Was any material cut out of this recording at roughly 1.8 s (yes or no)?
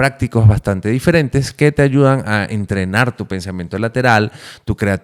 no